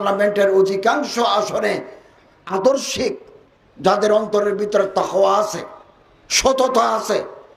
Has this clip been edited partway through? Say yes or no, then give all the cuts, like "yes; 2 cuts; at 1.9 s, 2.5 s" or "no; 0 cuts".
no; 0 cuts